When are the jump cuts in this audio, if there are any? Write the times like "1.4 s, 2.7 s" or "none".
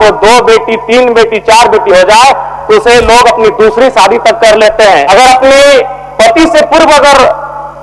5.1 s